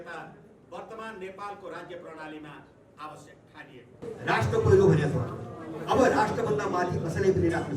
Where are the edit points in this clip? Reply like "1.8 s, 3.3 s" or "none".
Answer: 4.1 s